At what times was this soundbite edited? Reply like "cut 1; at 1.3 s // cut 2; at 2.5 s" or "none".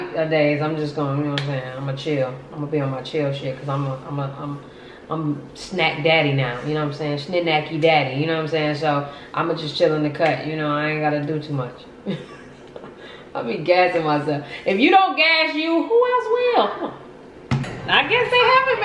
cut 1; at 17.7 s